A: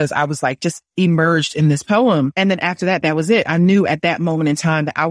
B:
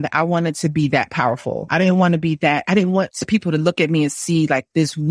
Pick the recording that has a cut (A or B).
B